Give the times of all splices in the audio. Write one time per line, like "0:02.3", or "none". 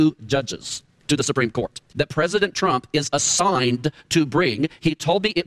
0:01.8